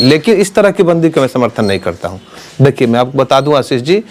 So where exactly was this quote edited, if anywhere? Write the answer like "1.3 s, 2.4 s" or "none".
none